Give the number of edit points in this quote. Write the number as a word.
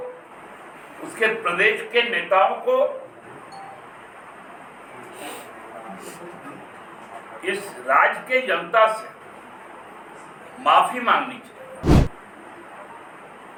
zero